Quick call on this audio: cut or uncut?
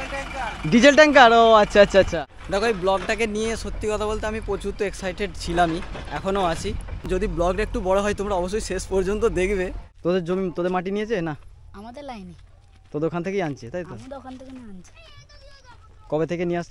cut